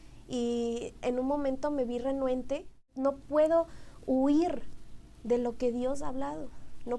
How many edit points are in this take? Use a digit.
1